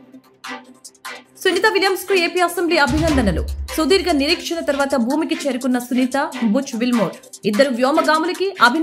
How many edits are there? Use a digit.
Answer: 1